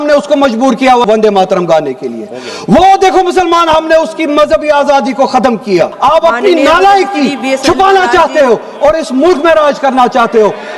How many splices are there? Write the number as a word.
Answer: two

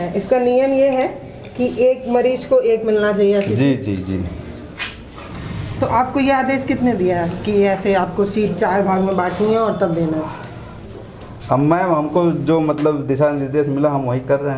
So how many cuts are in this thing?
zero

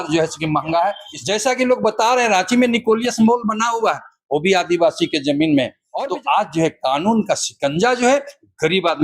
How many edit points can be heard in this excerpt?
two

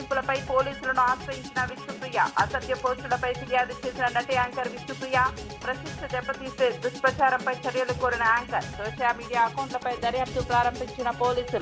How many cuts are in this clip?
zero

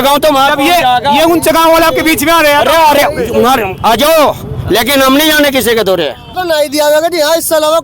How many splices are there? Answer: one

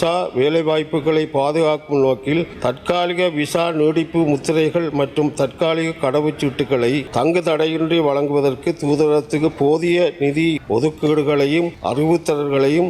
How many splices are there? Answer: four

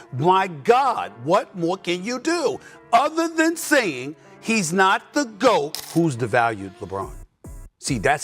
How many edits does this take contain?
one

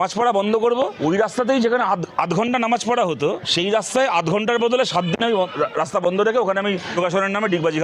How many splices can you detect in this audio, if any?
three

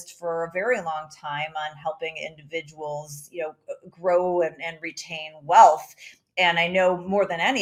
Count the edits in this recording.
zero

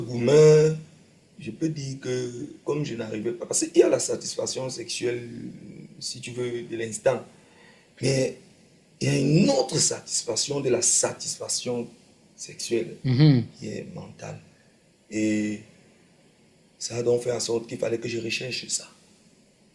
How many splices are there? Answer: zero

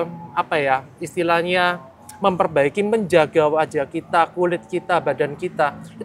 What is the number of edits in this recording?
zero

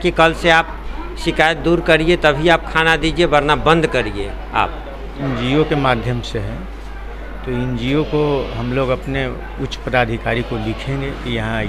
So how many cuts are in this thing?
one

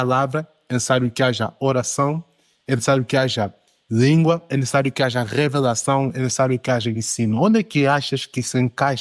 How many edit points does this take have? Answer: zero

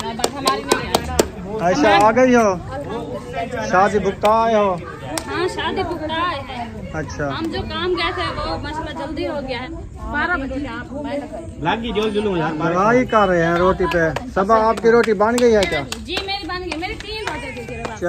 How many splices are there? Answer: three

